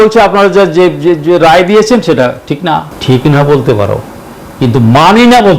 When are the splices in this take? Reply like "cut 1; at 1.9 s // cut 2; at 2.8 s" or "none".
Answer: cut 1; at 2.9 s